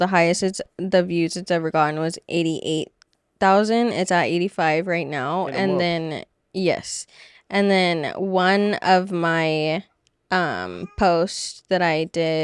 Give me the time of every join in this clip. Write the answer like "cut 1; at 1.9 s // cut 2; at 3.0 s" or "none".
none